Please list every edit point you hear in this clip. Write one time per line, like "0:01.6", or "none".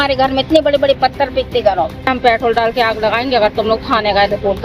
0:02.1